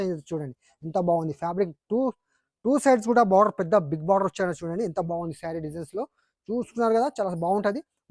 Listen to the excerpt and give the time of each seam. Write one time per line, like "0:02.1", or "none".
none